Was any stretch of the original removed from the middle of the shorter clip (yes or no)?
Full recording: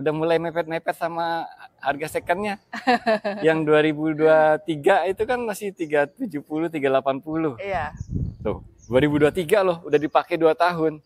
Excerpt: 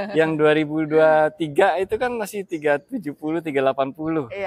no